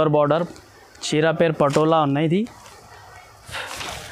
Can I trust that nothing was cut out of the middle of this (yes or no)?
yes